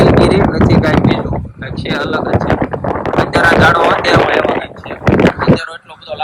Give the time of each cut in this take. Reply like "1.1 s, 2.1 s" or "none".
none